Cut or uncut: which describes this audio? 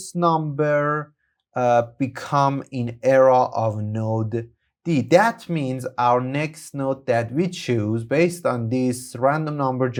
uncut